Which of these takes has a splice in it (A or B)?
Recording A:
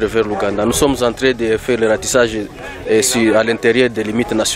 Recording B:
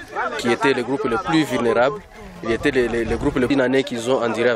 B